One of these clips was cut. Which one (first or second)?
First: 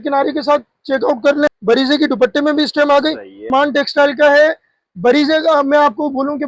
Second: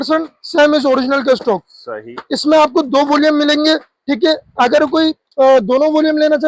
first